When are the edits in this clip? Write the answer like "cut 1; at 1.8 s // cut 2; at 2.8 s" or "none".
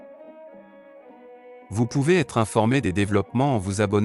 cut 1; at 1.7 s